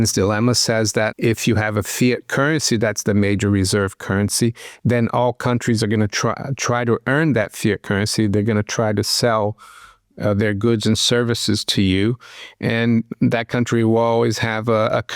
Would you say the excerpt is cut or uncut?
cut